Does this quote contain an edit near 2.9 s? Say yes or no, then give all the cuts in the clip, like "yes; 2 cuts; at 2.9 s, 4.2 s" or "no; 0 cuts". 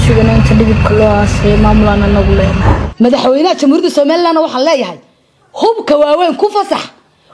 yes; 1 cut; at 2.9 s